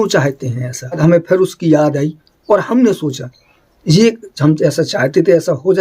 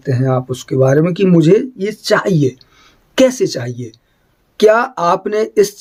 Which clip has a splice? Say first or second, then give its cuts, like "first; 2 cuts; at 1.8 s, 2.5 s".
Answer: first; 1 cut; at 1.0 s